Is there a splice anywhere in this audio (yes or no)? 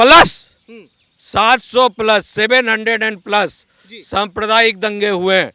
no